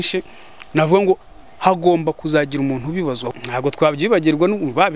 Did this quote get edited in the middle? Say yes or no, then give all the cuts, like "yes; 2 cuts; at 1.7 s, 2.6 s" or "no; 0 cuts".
yes; 1 cut; at 3.3 s